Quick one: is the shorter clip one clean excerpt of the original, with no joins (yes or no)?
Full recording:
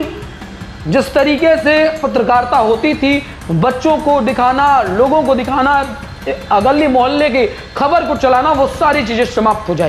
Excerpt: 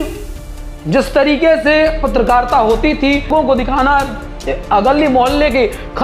no